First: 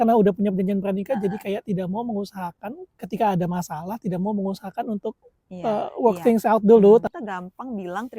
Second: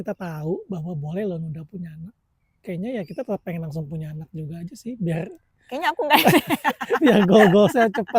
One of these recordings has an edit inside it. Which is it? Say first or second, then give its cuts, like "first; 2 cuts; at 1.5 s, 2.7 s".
first; 1 cut; at 7.1 s